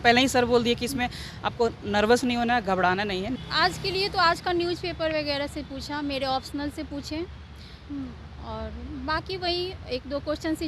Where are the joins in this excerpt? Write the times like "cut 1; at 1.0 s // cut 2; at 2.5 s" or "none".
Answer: cut 1; at 3.3 s